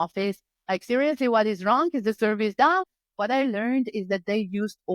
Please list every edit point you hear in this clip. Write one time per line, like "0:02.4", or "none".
0:02.8